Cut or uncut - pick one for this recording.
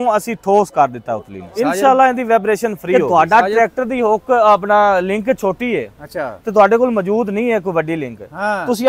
cut